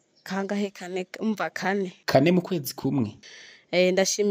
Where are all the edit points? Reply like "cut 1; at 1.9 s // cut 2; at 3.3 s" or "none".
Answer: cut 1; at 3.2 s